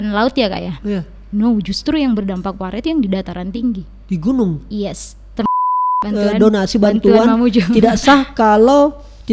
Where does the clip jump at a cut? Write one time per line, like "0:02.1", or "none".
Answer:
0:05.7